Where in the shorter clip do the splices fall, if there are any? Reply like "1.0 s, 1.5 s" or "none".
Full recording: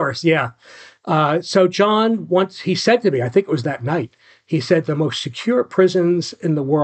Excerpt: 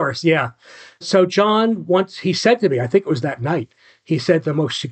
1.0 s